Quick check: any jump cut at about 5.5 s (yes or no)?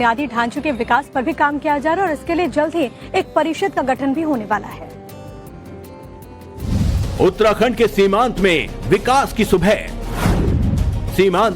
yes